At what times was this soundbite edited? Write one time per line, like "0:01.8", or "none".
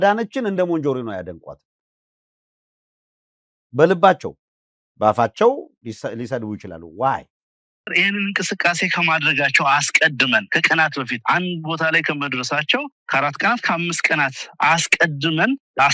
0:07.9